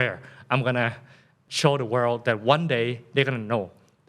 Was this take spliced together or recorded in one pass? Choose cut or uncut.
cut